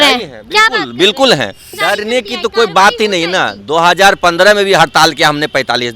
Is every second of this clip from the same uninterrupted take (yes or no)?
no